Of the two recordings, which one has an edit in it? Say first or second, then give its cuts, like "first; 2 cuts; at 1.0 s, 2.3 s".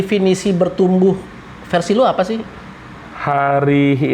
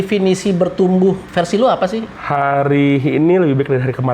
second; 2 cuts; at 1.2 s, 2.1 s